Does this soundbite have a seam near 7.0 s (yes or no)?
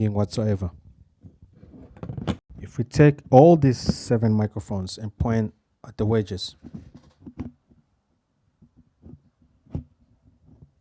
no